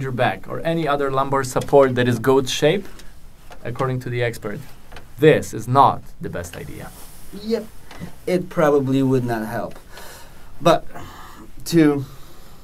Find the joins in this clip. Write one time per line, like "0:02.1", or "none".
none